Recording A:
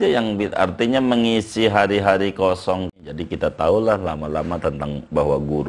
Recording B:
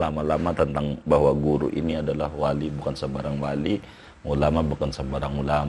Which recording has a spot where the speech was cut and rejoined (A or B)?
A